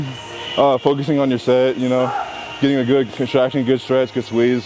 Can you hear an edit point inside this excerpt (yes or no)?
no